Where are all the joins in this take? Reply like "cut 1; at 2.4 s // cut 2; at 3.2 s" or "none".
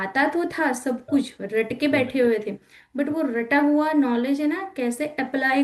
none